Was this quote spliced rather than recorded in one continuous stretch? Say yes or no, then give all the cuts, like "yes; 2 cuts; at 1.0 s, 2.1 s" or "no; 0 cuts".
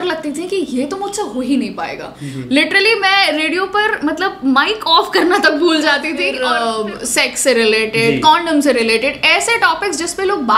yes; 1 cut; at 6.4 s